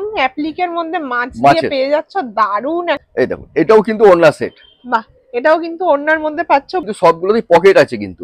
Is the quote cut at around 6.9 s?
yes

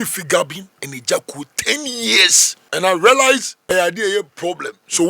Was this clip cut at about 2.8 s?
yes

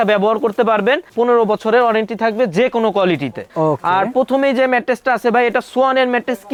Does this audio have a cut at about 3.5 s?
no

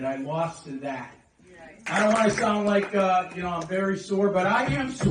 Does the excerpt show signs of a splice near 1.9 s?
yes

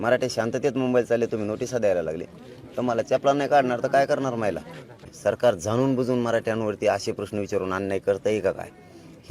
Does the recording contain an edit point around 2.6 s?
no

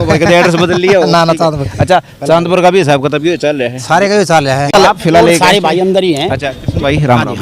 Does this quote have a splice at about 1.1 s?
no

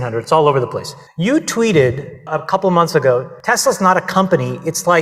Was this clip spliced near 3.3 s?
yes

